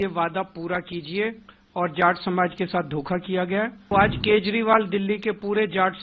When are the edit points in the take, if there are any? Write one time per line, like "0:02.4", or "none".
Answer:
0:03.8